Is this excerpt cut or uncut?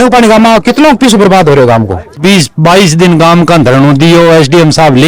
cut